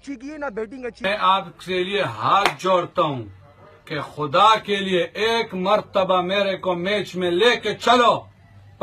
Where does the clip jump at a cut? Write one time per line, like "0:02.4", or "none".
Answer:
0:01.0